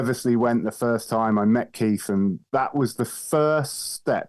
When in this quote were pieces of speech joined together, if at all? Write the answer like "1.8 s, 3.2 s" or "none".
2.4 s